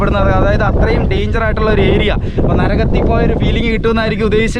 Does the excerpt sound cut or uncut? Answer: uncut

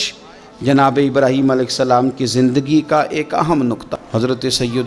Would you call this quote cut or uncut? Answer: cut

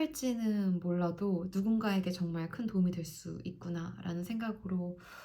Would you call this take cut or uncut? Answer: uncut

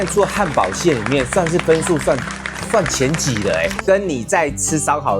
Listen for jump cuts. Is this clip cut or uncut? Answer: cut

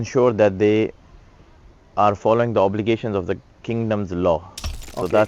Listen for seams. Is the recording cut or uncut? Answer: uncut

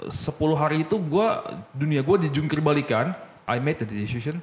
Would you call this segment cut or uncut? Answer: cut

